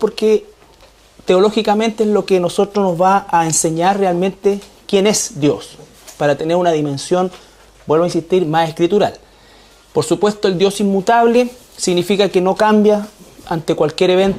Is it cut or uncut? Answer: uncut